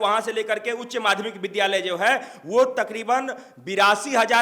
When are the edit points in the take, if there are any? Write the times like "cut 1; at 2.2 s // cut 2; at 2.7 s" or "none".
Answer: none